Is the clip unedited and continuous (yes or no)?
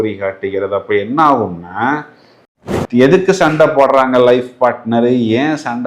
no